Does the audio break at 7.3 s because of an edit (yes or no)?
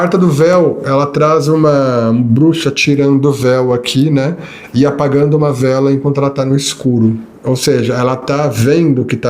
yes